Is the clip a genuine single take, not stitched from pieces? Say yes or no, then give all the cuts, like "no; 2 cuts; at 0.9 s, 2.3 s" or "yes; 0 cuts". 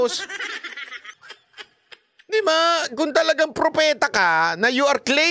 no; 1 cut; at 1.2 s